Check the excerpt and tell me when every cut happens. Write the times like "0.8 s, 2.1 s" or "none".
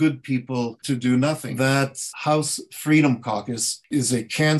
1.7 s, 3.9 s